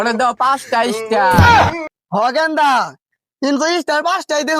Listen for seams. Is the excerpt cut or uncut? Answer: uncut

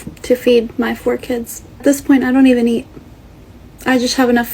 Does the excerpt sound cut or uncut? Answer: cut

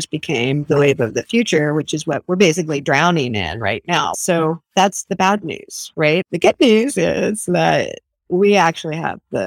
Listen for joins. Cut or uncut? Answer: cut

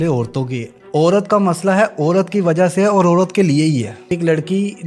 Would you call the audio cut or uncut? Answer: cut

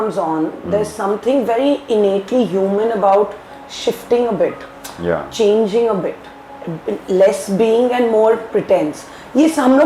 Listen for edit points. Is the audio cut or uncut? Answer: uncut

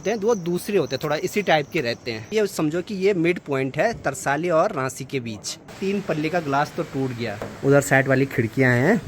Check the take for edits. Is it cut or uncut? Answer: cut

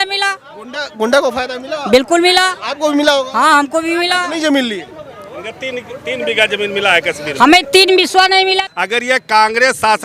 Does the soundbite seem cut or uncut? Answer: cut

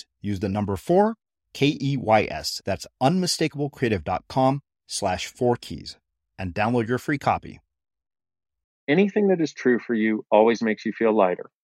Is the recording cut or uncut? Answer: cut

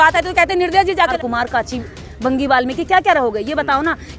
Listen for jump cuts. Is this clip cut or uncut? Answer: cut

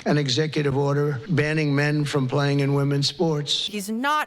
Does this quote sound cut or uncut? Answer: cut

